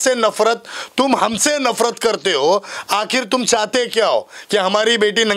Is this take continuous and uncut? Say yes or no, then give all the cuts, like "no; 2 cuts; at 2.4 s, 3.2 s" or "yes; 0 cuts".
yes; 0 cuts